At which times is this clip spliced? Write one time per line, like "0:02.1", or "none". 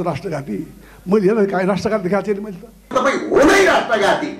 0:02.9